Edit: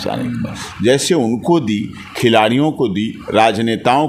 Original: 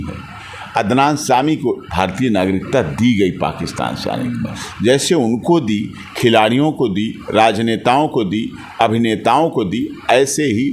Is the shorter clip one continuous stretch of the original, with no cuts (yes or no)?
yes